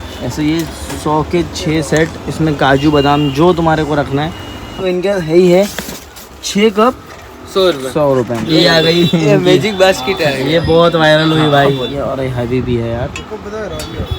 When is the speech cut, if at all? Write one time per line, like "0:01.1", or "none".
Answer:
0:04.8
0:08.4
0:11.9